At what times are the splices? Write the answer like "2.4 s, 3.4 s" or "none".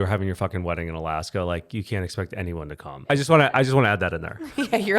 3.0 s